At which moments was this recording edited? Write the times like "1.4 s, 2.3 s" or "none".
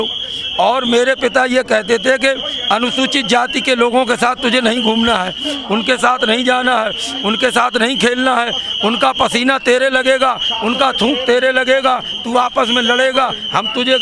none